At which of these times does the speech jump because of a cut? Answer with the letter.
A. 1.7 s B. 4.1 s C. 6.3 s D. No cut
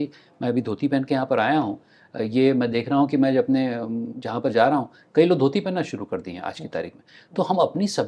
D